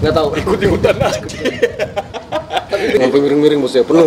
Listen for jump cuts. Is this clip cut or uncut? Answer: cut